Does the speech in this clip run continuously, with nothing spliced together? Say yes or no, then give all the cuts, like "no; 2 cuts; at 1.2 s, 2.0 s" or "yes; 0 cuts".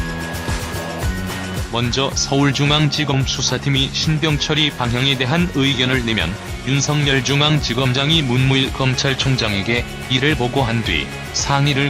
no; 1 cut; at 10.5 s